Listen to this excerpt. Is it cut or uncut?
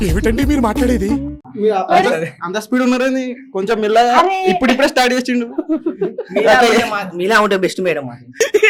uncut